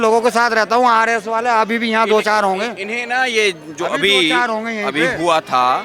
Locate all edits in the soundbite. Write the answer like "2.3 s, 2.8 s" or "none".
none